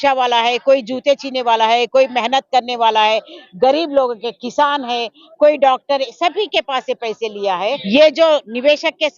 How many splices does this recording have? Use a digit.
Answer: 1